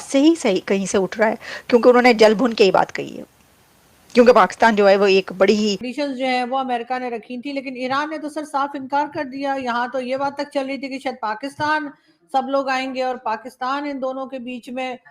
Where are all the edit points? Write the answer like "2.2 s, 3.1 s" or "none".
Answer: 5.9 s